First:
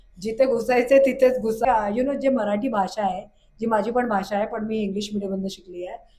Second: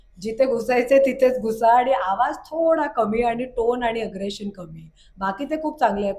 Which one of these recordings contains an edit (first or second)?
first